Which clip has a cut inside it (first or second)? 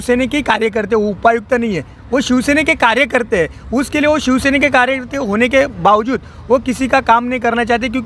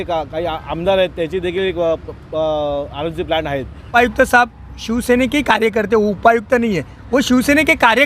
second